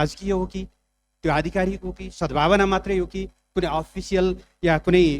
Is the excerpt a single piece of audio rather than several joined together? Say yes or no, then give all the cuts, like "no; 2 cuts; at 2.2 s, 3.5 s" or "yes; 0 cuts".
yes; 0 cuts